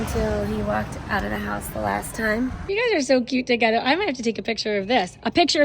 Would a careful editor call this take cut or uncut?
cut